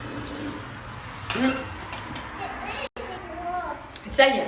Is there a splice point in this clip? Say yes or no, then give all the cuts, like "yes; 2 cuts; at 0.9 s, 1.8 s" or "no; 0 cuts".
yes; 1 cut; at 3.2 s